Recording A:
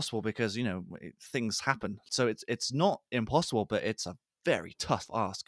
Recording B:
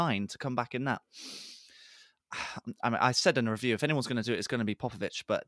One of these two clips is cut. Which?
A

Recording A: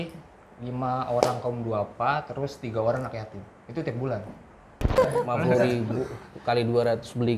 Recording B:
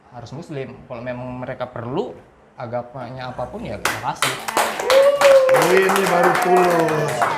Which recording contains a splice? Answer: A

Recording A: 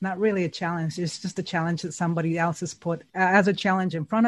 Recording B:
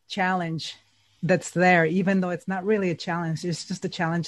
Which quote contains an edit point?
A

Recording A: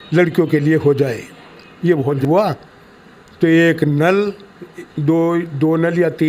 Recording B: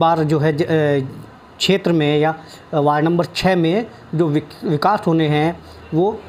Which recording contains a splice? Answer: A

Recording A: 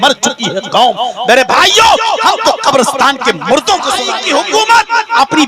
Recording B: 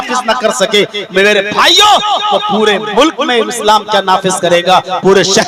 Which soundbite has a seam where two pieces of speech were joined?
A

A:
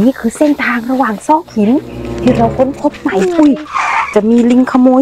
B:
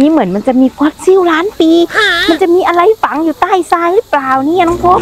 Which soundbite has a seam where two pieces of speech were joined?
A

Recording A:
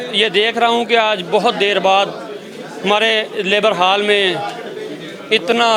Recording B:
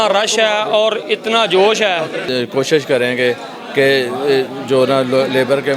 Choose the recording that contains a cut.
B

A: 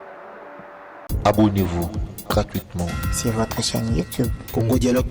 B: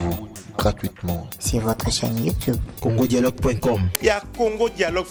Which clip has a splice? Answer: A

